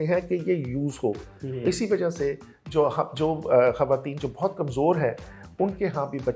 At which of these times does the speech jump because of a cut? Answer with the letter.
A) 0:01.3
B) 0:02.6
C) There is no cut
C